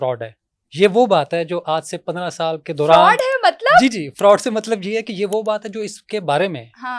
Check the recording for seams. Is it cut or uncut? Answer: uncut